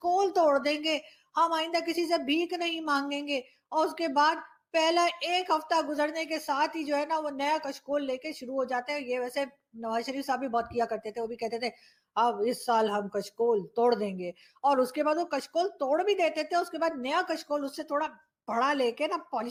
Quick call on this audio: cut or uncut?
uncut